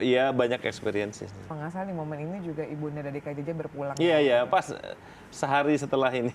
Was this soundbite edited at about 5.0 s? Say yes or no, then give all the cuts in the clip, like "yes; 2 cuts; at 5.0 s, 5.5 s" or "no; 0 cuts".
no; 1 cut; at 1.6 s